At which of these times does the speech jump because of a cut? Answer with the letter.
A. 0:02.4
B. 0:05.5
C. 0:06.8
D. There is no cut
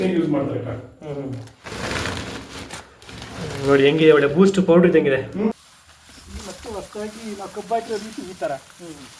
B